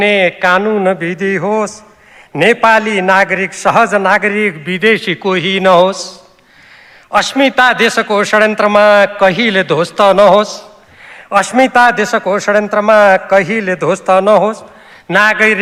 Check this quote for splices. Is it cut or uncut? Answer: uncut